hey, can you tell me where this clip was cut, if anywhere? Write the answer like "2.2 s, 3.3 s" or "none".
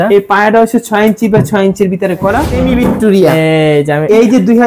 2.5 s